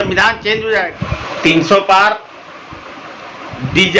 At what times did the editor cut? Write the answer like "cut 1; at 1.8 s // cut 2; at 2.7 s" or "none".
cut 1; at 1.0 s